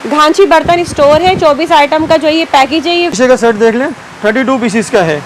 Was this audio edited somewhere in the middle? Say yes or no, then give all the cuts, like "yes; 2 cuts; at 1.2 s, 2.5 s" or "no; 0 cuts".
yes; 1 cut; at 3.1 s